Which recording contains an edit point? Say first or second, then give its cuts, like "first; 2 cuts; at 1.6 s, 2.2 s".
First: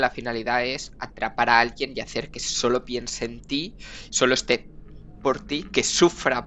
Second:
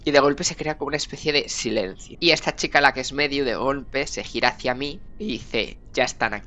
second; 2 cuts; at 2.0 s, 5.0 s